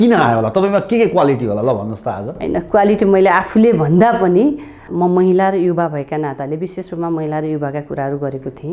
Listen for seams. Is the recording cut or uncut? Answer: cut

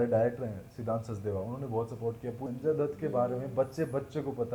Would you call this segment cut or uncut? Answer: cut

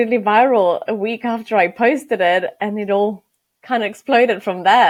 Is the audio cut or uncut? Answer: uncut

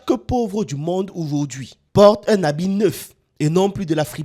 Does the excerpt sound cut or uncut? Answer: uncut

